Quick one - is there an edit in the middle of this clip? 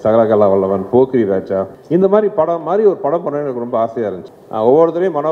yes; 2 cuts; at 1.8 s, 4.3 s

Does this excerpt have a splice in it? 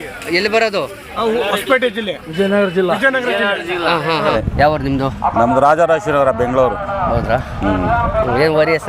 yes; 1 cut; at 4.3 s

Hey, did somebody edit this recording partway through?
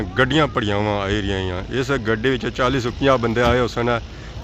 no; 0 cuts

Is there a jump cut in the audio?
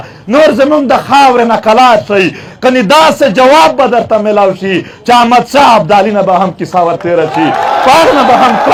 no; 0 cuts

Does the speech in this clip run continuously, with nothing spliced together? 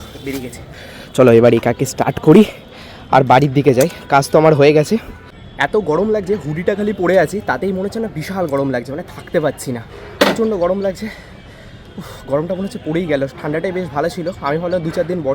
yes; 0 cuts

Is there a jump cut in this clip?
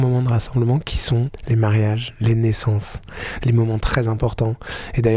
yes; 1 cut; at 1.3 s

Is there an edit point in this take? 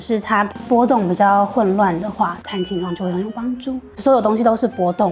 yes; 1 cut; at 3.9 s

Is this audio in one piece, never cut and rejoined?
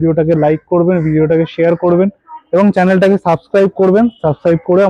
yes; 0 cuts

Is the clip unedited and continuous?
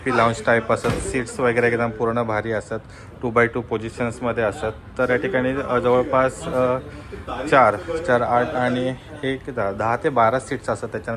yes; 0 cuts

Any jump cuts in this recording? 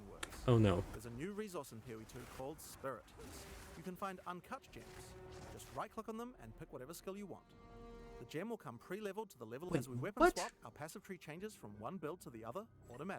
yes; 2 cuts; at 3.4 s, 9.7 s

